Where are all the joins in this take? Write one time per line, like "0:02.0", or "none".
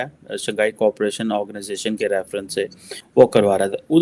0:03.0